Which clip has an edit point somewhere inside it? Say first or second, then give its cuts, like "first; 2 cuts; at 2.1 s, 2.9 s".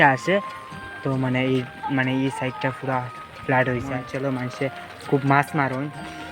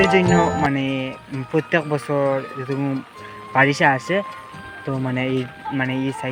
first; 1 cut; at 4.1 s